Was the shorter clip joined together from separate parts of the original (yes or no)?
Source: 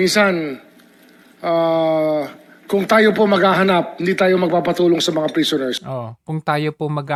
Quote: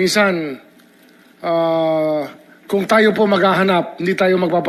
no